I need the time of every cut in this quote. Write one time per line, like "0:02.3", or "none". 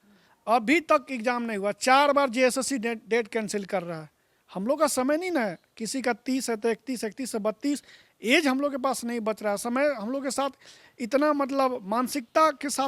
none